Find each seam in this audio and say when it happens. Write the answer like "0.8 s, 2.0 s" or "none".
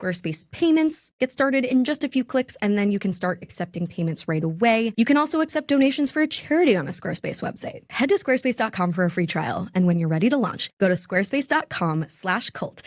1.1 s, 4.9 s, 7.8 s